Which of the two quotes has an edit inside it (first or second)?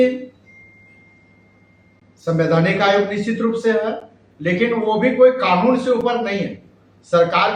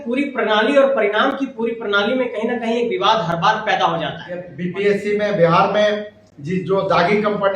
second